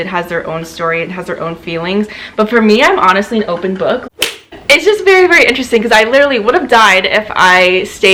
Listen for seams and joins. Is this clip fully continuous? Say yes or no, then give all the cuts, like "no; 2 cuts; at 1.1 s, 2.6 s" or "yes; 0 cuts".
no; 1 cut; at 4.0 s